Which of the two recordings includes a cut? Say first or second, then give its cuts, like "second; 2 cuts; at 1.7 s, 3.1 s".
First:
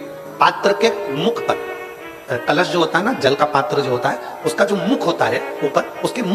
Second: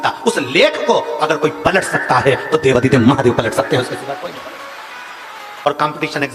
second; 1 cut; at 5.5 s